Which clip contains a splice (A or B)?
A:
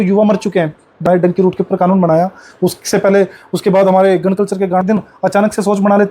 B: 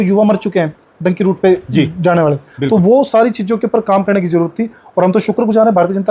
A